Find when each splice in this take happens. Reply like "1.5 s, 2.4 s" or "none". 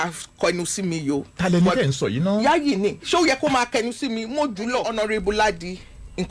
4.9 s